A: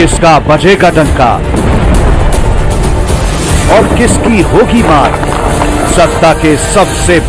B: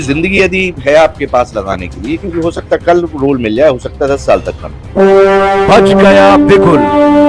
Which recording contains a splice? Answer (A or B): B